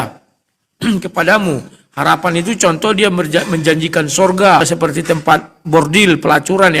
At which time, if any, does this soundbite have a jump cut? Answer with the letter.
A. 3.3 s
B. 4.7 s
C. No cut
B